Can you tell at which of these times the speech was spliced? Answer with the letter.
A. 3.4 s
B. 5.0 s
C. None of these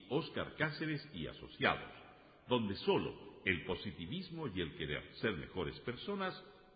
C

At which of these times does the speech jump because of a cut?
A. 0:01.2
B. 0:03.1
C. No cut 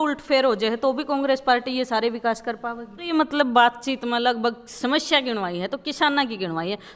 B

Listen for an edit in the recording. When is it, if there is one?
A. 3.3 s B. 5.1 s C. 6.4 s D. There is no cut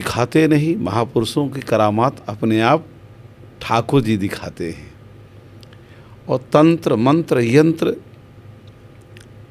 D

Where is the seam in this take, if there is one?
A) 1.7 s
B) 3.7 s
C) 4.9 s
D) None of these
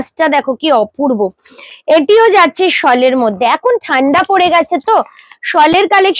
D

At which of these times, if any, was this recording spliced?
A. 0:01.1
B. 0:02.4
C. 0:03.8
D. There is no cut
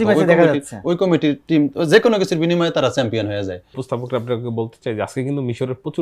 C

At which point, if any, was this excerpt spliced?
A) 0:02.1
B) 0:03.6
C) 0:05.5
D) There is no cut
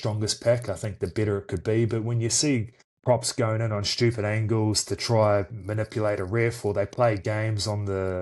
D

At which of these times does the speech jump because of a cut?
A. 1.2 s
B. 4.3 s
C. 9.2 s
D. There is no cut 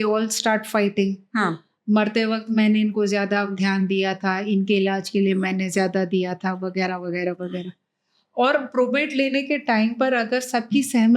D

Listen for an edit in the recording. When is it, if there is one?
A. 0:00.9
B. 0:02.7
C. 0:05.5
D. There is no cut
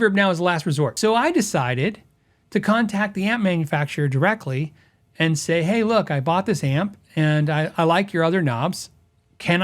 A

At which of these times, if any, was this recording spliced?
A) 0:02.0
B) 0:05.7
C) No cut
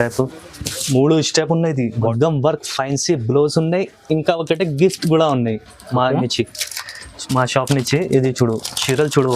A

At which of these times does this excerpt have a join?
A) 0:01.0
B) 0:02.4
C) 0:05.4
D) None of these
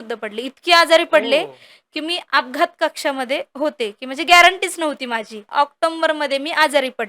C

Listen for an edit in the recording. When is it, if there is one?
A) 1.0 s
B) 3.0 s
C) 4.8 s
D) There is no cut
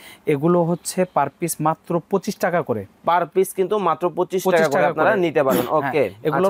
D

